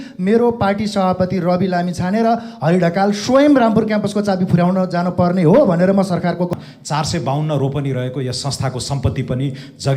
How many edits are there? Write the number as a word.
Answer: one